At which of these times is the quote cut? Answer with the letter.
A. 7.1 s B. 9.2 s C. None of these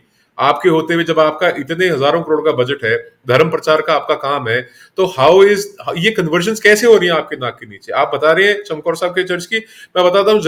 C